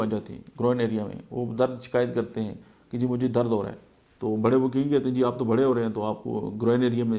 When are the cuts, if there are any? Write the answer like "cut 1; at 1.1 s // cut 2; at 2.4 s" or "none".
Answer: none